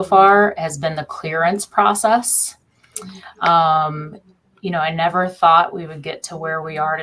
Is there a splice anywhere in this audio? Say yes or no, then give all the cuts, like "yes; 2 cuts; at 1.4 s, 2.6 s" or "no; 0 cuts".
no; 0 cuts